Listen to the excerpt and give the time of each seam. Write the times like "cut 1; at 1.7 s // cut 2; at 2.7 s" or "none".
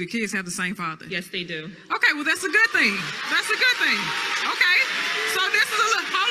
cut 1; at 4.6 s